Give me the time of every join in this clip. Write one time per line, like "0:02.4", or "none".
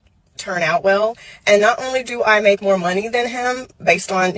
0:02.9